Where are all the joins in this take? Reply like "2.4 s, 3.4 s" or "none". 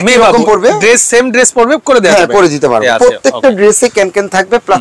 2.8 s